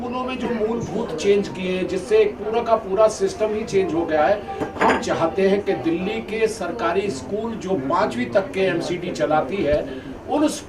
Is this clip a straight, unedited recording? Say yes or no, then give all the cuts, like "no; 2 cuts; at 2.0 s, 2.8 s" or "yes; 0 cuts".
yes; 0 cuts